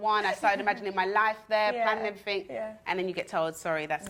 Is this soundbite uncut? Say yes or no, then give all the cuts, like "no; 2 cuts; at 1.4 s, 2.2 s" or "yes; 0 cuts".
yes; 0 cuts